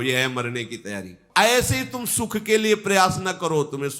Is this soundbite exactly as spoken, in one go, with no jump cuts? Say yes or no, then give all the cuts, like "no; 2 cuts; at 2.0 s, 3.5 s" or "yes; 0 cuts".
no; 1 cut; at 1.2 s